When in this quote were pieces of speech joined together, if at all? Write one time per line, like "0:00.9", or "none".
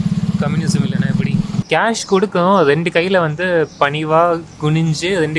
0:01.6